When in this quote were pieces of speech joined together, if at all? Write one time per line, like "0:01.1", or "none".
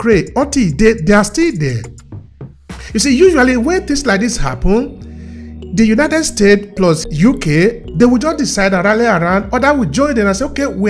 0:07.1